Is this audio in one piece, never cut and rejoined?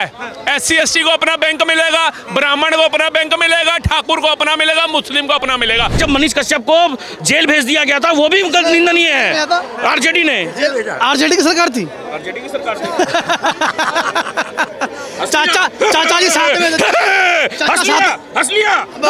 no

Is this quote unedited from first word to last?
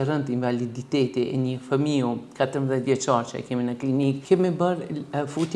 no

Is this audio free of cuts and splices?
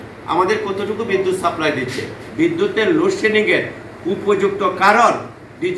no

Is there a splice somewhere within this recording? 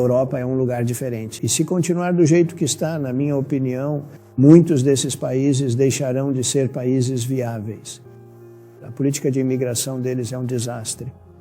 yes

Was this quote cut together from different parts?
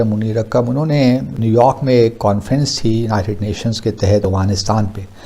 yes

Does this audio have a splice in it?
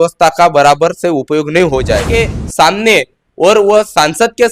yes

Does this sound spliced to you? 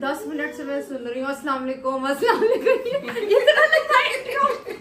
no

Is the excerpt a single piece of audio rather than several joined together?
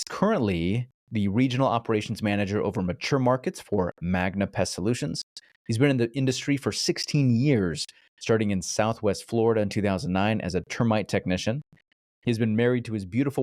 yes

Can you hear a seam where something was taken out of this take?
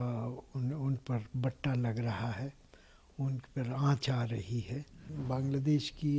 yes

